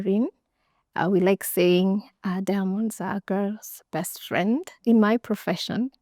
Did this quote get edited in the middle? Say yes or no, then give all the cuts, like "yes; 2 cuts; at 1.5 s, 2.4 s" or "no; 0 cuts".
yes; 1 cut; at 4.8 s